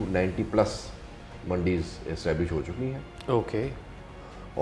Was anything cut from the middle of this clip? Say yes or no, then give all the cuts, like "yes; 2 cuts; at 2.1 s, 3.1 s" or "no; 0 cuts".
no; 0 cuts